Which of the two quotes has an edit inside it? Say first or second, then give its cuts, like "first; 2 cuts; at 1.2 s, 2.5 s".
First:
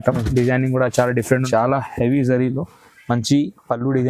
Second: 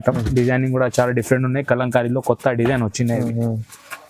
first; 1 cut; at 1.4 s